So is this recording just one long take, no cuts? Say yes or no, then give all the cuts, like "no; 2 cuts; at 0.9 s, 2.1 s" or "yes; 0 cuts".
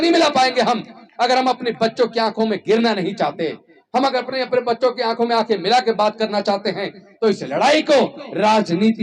yes; 0 cuts